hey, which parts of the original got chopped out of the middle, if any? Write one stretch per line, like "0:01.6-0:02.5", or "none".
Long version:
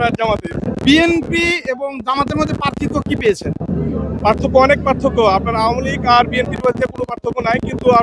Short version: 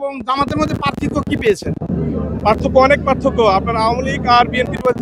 none